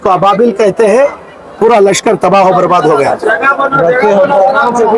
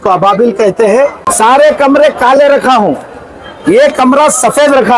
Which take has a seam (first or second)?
second